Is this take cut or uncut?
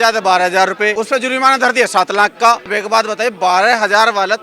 cut